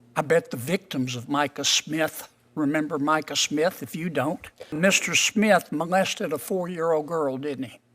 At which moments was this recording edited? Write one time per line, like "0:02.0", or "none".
0:04.8